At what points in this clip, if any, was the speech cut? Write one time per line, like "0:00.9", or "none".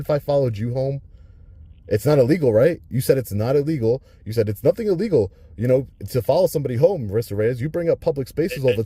none